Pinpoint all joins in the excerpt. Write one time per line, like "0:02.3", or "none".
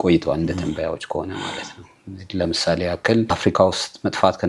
0:03.4